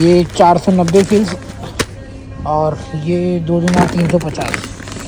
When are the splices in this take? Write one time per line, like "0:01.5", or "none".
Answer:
none